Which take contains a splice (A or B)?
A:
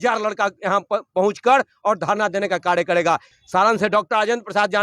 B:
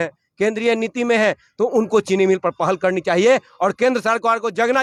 A